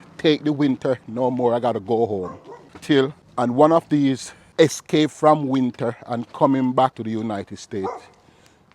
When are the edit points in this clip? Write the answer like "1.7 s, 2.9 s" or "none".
3.1 s, 4.4 s, 7.0 s